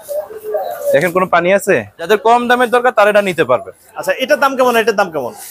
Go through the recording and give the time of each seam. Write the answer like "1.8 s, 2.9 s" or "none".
1.9 s